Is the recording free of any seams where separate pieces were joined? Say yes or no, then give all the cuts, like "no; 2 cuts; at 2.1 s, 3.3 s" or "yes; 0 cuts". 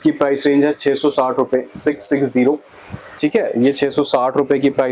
yes; 0 cuts